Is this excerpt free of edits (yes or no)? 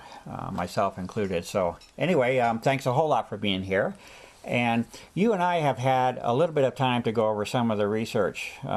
yes